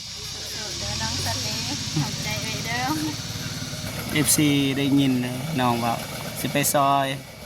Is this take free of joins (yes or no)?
no